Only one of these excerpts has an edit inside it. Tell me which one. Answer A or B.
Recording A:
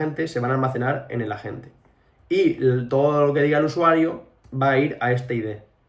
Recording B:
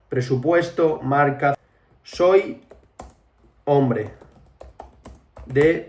B